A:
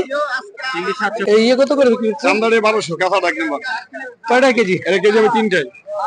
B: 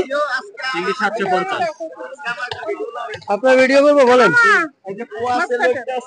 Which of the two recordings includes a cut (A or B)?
A